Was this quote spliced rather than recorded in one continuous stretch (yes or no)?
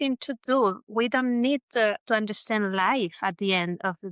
no